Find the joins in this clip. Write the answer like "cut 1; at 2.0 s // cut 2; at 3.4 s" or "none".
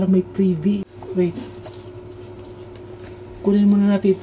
cut 1; at 1.0 s

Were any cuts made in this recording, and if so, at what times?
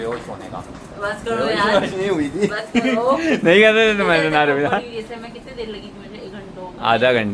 none

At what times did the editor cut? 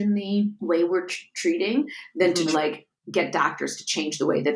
cut 1; at 2.5 s

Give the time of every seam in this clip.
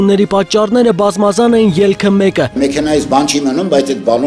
cut 1; at 2.6 s

